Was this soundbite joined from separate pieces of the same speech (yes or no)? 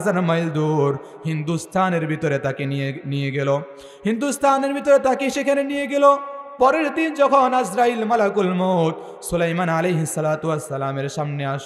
no